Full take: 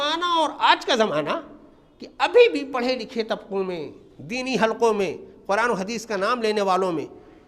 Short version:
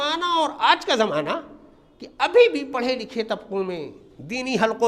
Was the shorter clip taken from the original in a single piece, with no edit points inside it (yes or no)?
yes